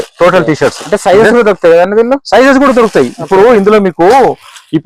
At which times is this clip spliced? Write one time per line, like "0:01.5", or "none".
none

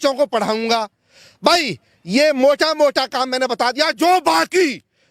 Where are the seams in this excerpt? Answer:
none

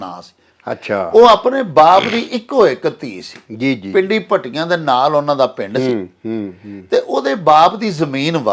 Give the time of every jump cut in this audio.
none

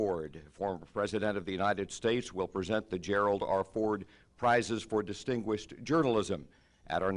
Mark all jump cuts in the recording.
0:01.8

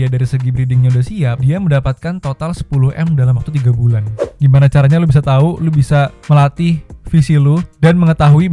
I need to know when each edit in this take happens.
0:04.2

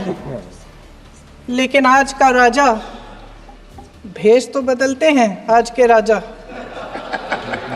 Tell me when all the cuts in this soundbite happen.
none

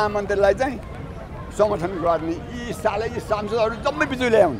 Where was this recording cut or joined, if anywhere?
none

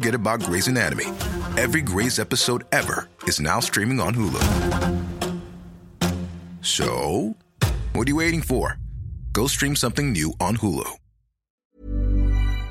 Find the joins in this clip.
0:11.5

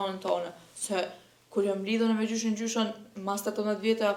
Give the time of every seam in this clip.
none

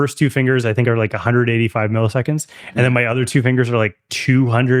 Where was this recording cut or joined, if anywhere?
none

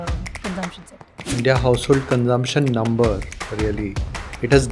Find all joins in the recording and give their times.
0:01.3

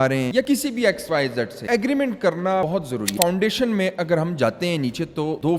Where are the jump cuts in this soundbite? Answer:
0:03.1

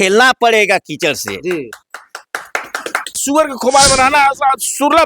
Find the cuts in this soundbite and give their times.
0:03.1

